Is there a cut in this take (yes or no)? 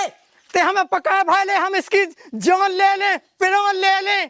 no